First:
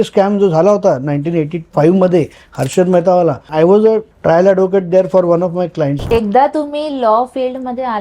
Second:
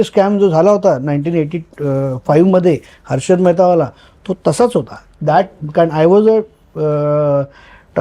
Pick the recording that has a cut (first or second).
first